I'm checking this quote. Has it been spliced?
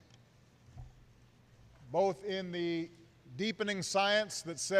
yes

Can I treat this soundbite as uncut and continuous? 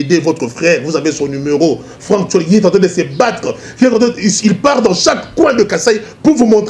yes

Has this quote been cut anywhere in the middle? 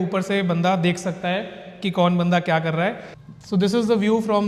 yes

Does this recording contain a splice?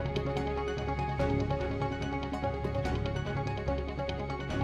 no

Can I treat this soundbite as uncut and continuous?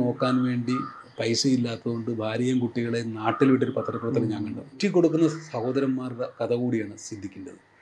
no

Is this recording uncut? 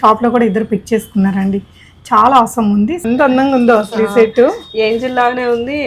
no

